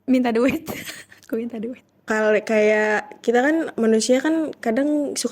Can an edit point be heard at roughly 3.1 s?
no; 1 cut; at 1.9 s

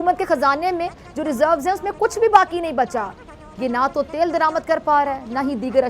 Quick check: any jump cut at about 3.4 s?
yes; 1 cut; at 3.4 s

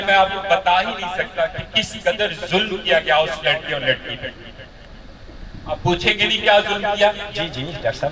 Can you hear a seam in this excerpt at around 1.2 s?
no; 0 cuts

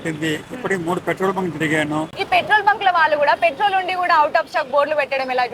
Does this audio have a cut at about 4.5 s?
no; 1 cut; at 2.1 s

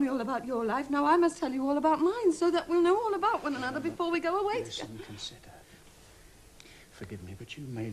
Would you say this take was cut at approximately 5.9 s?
no; 1 cut; at 2.5 s

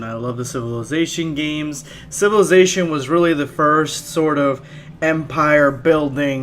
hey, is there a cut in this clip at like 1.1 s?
no; 1 cut; at 2.6 s

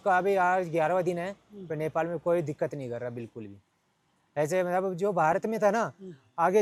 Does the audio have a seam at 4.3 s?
no; 0 cuts

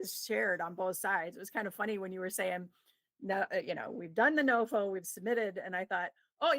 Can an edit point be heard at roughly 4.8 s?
no; 1 cut; at 1.4 s

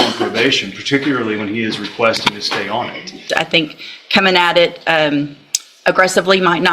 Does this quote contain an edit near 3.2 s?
yes; 1 cut; at 3.2 s

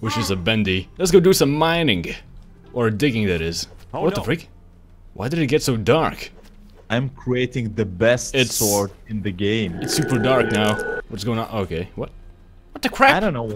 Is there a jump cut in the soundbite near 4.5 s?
no; 0 cuts

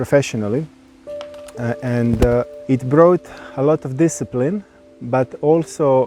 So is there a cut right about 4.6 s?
no; 1 cut; at 2.6 s

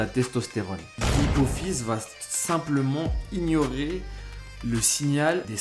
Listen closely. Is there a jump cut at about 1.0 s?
yes; 1 cut; at 1.0 s

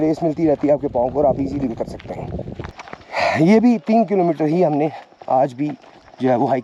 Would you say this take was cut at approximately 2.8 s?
yes; 1 cut; at 2.8 s

